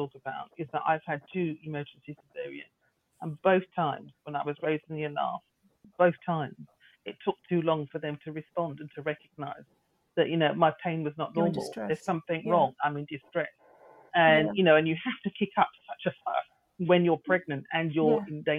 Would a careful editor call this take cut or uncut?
cut